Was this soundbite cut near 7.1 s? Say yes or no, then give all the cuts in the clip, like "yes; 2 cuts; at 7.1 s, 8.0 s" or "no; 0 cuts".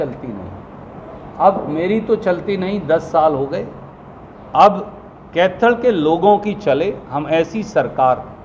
no; 0 cuts